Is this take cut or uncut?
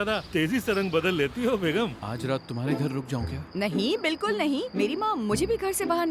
cut